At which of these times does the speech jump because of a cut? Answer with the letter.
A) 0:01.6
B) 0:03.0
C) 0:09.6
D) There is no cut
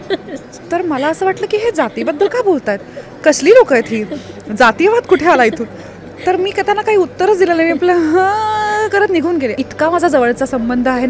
C